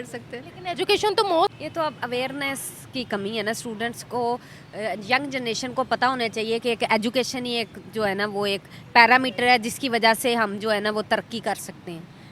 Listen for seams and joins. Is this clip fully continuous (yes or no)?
no